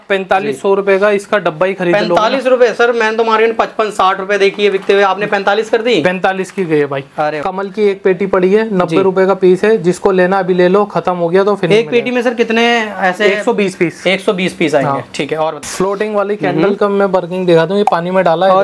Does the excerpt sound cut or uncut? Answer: cut